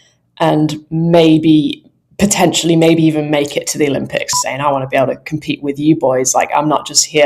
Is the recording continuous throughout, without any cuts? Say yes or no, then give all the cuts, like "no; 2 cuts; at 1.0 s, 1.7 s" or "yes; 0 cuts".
no; 1 cut; at 4.3 s